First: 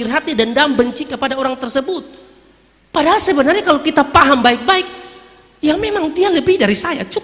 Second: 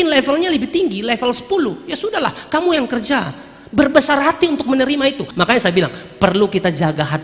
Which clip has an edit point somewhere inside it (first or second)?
second